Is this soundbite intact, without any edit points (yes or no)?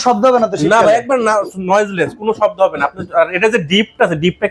yes